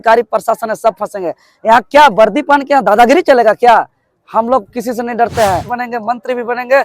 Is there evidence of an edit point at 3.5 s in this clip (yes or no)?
no